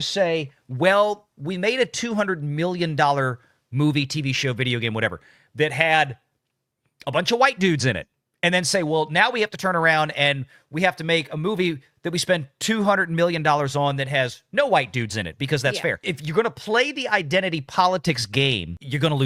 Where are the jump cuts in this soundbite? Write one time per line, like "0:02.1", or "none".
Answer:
none